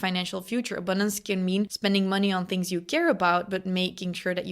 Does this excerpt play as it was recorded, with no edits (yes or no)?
no